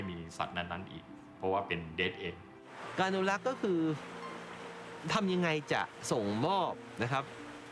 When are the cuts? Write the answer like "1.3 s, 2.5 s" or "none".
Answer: 2.8 s